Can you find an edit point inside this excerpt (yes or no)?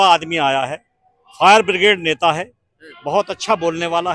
no